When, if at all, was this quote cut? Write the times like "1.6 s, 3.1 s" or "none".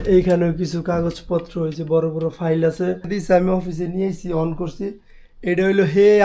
3.1 s